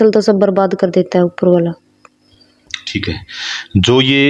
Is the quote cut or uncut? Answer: uncut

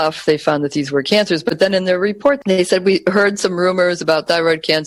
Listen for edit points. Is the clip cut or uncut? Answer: uncut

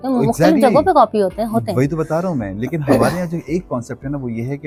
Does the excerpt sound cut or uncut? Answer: uncut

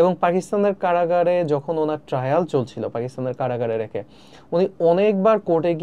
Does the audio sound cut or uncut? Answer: uncut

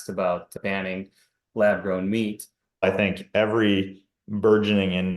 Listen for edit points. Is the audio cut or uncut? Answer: cut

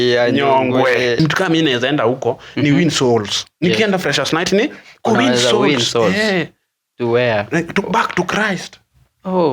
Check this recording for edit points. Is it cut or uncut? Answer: cut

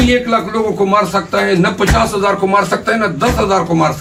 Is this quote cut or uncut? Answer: uncut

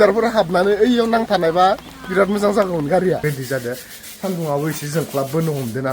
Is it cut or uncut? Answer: cut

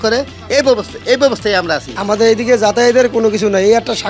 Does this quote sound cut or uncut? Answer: cut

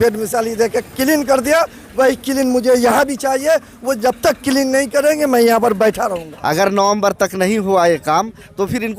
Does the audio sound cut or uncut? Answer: cut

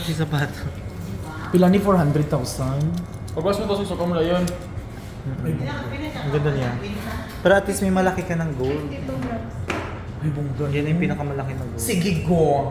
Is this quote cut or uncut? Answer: uncut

